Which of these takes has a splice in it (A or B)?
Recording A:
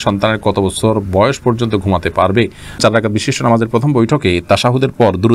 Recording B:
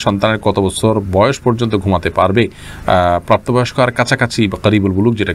A